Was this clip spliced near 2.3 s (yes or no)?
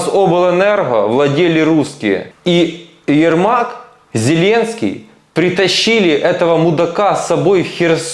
yes